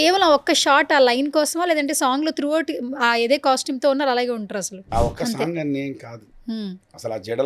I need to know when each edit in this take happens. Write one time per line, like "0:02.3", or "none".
0:04.9